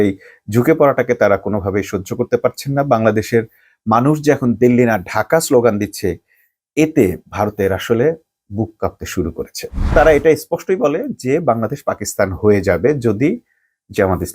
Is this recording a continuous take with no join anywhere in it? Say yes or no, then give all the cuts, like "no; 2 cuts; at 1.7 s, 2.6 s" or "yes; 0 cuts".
no; 1 cut; at 9.9 s